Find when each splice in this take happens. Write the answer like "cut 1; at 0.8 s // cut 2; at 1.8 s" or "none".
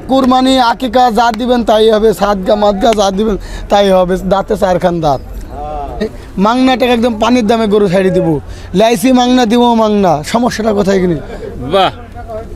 cut 1; at 6.2 s